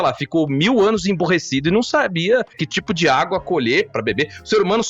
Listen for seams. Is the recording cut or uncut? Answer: cut